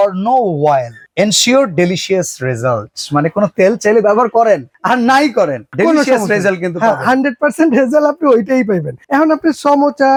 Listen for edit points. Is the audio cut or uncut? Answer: uncut